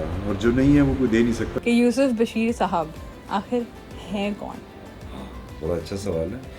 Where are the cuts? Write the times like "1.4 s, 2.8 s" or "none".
1.5 s